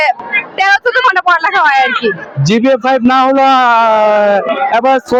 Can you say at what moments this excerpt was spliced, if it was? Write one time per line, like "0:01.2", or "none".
none